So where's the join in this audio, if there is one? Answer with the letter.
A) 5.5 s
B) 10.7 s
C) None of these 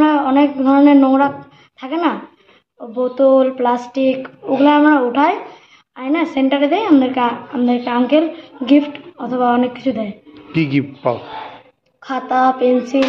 C